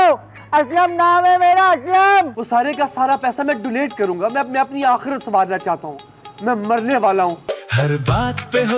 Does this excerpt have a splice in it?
yes; 2 cuts; at 2.4 s, 7.5 s

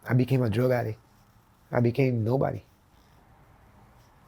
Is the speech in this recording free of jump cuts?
no; 1 cut; at 2.9 s

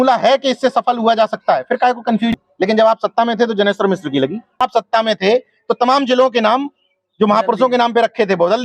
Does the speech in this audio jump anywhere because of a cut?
yes; 2 cuts; at 2.3 s, 4.6 s

